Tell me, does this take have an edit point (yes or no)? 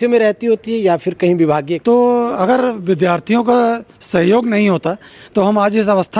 yes